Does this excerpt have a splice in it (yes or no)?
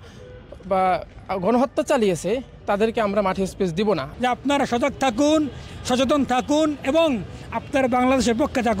yes